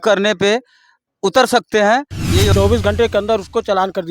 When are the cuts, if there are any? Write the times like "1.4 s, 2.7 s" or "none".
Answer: 2.5 s